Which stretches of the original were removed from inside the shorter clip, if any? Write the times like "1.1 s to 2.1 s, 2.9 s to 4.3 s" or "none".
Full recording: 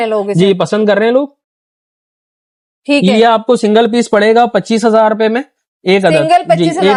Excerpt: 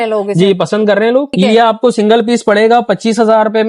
1.4 s to 3.0 s

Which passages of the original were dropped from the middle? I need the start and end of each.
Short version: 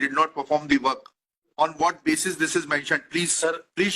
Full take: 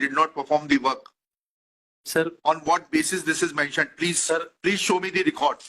1.5 s to 2.3 s

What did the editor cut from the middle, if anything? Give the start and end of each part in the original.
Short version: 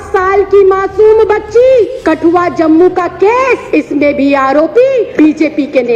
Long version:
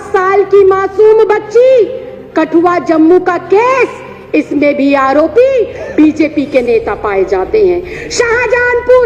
2.0 s to 2.3 s, 3.9 s to 4.2 s, 5.7 s to 5.9 s

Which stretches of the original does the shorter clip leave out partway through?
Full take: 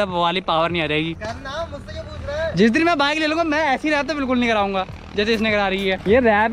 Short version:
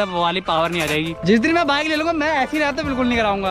1.2 s to 2.5 s

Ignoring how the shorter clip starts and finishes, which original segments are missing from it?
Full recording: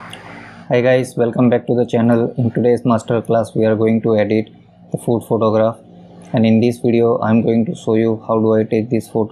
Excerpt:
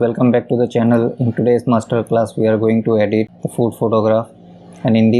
4.6 s to 4.9 s

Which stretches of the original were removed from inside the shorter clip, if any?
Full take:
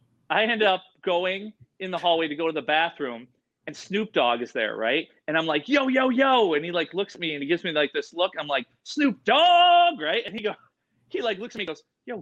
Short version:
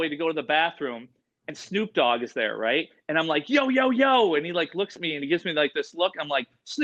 none

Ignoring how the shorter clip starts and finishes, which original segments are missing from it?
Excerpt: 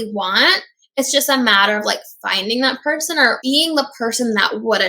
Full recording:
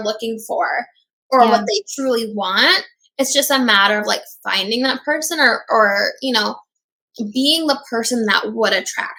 5.6 s to 7.3 s

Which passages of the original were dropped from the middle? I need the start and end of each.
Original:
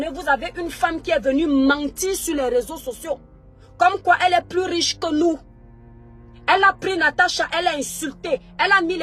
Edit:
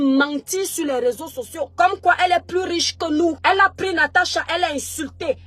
3.2 s to 3.7 s, 5.4 s to 6.4 s

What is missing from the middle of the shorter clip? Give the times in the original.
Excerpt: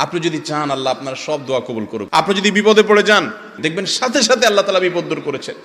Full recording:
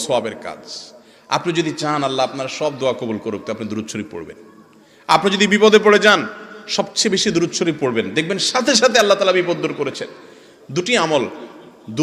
3.4 s to 5.0 s, 6.6 s to 8.1 s

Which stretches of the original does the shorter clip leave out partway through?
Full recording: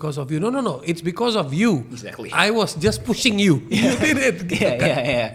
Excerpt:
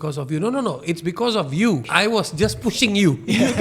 1.9 s to 2.3 s

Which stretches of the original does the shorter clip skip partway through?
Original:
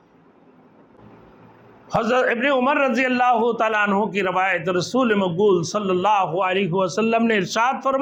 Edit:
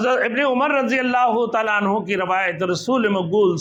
none

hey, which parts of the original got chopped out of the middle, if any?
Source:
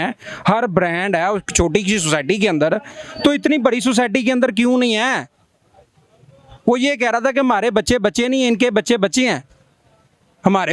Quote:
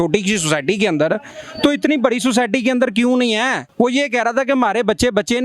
5.2 s to 6.5 s

